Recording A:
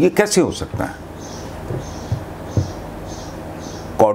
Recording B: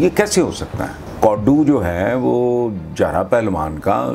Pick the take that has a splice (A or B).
B